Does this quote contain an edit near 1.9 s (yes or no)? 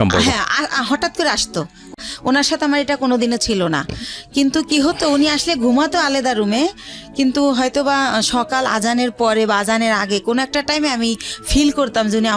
yes